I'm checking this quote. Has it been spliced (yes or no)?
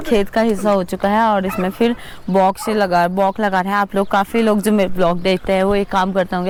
no